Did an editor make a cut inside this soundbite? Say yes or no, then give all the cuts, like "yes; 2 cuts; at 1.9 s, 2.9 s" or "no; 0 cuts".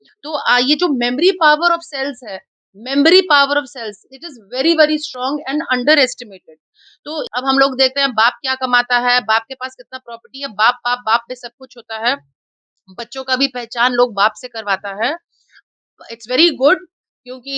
yes; 1 cut; at 7.3 s